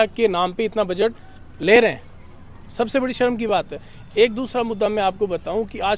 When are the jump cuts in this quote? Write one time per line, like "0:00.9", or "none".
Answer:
none